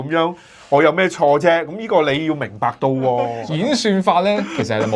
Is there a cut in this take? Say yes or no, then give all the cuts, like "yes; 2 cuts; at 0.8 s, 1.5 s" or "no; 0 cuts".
yes; 1 cut; at 3.4 s